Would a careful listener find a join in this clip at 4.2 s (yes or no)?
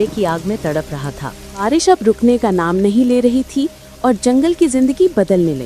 no